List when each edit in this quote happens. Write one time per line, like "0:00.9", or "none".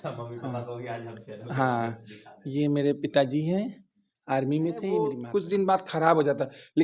0:05.2